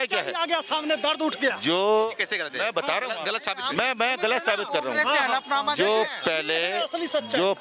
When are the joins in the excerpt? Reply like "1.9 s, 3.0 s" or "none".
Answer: none